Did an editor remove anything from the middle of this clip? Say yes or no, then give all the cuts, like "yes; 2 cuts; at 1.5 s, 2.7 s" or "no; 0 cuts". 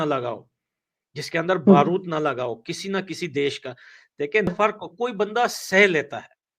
yes; 1 cut; at 4.5 s